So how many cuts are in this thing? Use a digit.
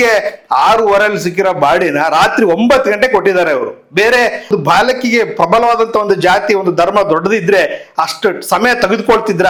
0